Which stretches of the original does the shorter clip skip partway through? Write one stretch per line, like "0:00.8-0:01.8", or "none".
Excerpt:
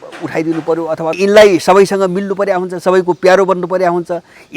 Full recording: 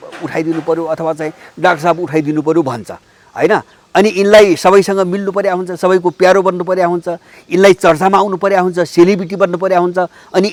0:01.2-0:04.1